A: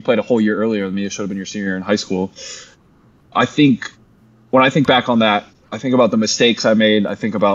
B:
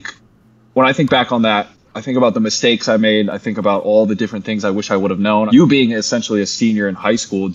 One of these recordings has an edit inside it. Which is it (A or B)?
B